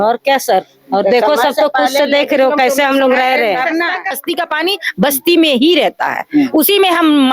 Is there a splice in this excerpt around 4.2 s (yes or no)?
yes